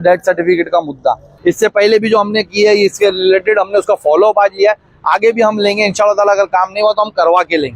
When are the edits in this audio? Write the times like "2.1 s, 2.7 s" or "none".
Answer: 1.3 s